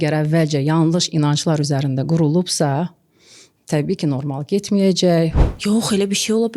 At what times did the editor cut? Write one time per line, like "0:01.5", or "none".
0:05.5